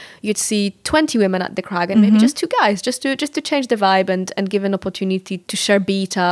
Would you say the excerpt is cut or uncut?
cut